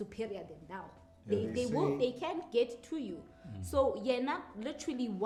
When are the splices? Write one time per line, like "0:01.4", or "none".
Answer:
none